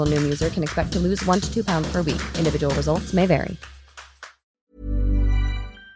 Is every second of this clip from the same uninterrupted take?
no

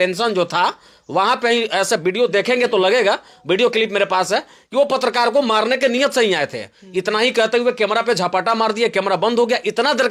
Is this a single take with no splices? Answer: yes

